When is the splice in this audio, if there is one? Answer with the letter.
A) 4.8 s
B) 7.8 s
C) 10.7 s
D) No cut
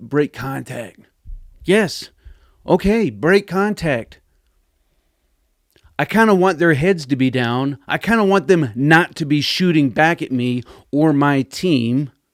D